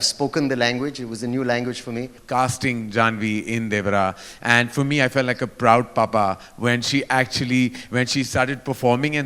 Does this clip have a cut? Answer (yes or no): yes